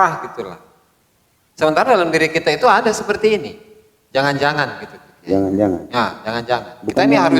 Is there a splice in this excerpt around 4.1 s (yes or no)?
no